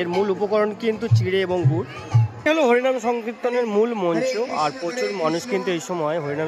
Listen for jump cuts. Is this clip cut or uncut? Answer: cut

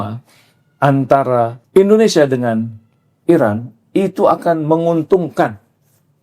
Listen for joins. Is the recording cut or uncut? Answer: cut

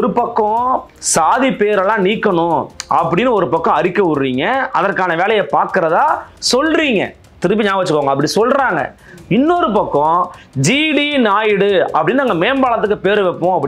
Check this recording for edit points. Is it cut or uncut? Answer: uncut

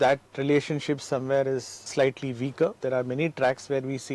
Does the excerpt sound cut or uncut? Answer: cut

